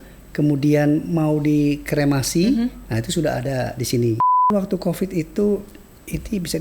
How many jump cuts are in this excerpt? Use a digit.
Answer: 1